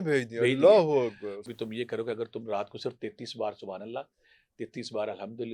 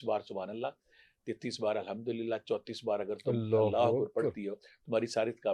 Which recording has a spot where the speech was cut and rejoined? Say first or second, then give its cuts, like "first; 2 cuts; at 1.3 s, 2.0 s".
first; 1 cut; at 1.3 s